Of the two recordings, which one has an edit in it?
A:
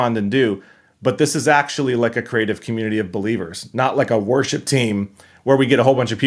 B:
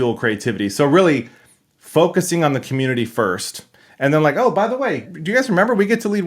B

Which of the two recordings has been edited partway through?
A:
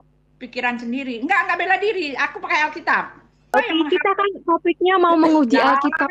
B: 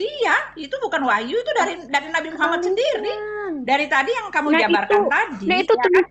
A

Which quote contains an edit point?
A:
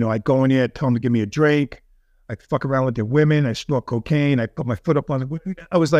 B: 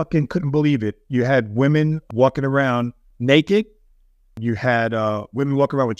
B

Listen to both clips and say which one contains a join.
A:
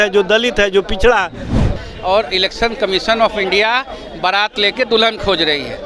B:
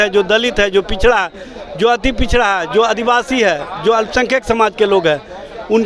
A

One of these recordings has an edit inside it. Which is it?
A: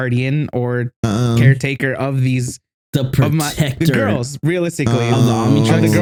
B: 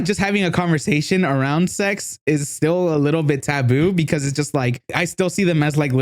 B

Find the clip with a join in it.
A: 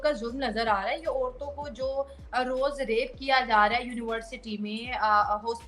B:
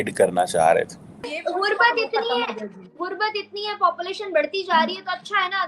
B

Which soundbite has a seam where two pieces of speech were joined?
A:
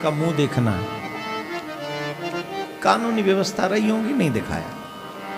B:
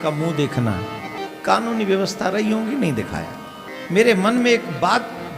B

